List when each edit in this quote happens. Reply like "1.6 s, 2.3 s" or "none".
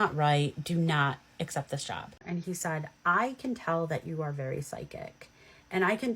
2.2 s